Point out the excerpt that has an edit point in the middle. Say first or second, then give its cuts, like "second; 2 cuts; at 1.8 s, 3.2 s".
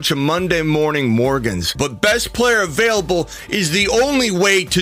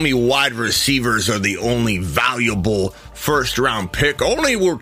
first; 1 cut; at 1.7 s